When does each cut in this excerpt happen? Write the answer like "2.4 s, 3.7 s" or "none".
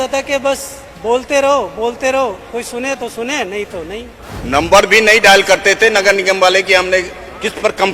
4.2 s